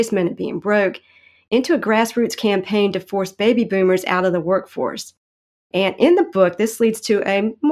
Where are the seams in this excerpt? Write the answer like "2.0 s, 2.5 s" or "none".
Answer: none